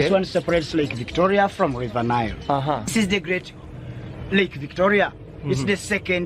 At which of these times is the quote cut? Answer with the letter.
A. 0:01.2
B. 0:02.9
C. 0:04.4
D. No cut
B